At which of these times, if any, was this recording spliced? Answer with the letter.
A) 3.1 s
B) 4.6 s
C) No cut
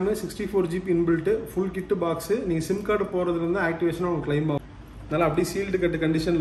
B